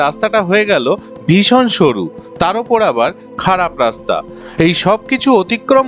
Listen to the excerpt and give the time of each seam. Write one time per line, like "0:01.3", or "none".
0:04.3